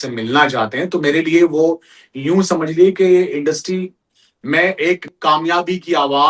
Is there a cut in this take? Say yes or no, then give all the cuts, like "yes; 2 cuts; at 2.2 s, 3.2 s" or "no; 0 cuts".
yes; 1 cut; at 5.1 s